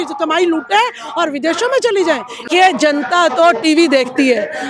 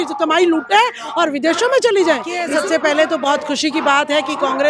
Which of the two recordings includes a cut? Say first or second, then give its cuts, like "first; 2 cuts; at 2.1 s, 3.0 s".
second; 1 cut; at 2.4 s